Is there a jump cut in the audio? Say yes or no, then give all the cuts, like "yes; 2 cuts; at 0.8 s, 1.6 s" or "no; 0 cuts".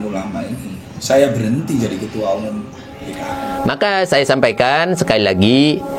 yes; 1 cut; at 3.3 s